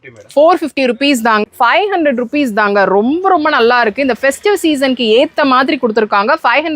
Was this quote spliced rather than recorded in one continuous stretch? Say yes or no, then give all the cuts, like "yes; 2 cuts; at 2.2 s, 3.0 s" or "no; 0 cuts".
yes; 1 cut; at 1.4 s